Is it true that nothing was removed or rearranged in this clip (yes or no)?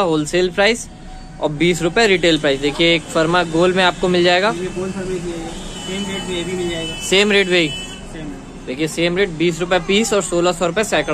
yes